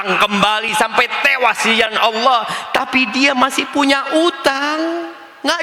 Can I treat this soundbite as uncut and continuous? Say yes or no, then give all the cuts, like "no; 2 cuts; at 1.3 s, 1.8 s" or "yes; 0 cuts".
yes; 0 cuts